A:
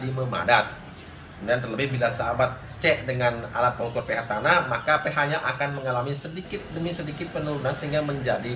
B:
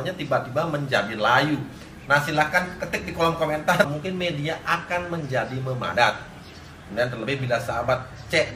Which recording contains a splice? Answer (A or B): B